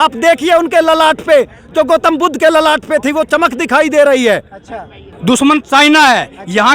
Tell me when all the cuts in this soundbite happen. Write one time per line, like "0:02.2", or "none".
0:05.1